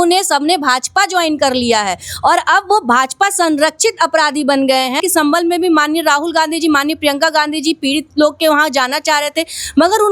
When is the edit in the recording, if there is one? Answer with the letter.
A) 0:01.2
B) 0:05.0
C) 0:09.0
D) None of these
B